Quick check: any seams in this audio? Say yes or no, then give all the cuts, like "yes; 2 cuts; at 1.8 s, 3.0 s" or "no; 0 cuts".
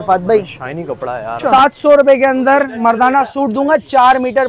yes; 1 cut; at 1.3 s